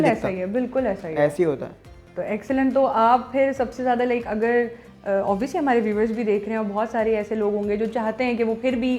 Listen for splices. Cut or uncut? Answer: uncut